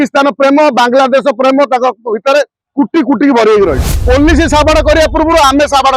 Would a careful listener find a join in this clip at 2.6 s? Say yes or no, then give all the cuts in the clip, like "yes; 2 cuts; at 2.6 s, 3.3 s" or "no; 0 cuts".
no; 1 cut; at 3.9 s